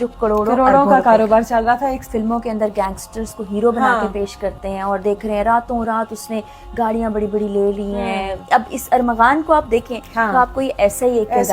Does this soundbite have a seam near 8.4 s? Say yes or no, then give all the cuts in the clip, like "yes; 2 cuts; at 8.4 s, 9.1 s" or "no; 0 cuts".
yes; 2 cuts; at 2.0 s, 8.4 s